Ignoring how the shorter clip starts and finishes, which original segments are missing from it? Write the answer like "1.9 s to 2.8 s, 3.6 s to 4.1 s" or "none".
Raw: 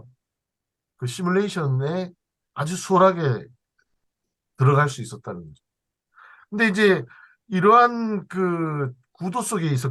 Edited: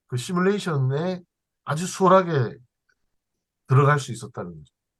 none